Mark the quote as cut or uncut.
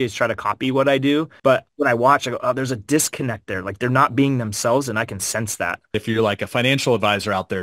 cut